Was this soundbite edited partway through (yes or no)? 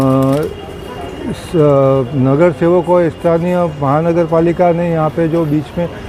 no